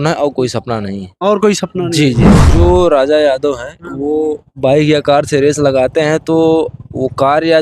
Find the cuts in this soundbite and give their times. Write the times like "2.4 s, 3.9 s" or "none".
2.4 s